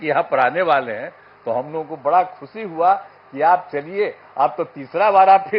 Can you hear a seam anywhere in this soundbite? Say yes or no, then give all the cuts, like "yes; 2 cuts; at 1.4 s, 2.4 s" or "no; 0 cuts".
no; 0 cuts